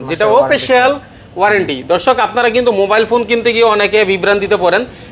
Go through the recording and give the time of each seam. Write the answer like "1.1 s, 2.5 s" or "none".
none